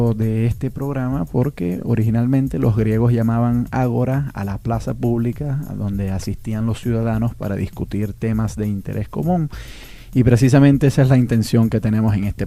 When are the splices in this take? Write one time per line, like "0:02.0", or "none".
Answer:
0:01.2